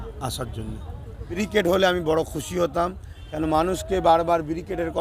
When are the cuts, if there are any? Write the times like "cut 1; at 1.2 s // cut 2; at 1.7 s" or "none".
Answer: cut 1; at 1.4 s